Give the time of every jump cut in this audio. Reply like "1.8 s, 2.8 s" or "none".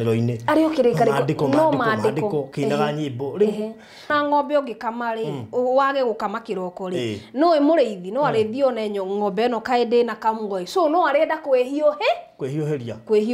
4.1 s